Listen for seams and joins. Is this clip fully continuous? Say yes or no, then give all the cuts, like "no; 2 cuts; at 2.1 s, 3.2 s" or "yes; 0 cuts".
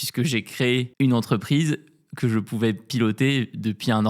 no; 1 cut; at 0.9 s